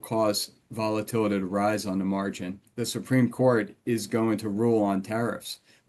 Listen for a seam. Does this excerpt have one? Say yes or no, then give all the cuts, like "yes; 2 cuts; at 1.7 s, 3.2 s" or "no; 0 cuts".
yes; 1 cut; at 2.7 s